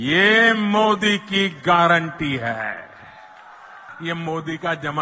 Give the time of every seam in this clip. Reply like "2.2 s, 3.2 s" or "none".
3.9 s